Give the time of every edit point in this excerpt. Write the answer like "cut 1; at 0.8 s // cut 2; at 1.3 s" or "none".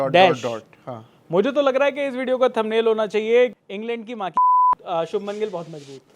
cut 1; at 3.5 s